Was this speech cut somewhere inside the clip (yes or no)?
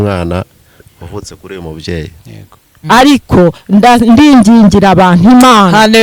yes